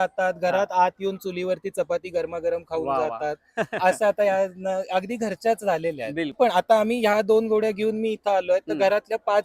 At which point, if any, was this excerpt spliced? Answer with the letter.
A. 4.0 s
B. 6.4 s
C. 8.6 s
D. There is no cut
B